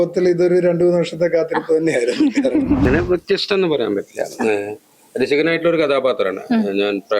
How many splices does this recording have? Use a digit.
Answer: 1